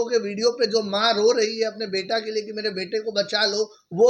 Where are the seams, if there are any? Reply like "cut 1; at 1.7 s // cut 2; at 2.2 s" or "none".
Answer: none